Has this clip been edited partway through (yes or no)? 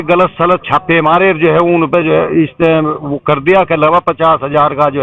no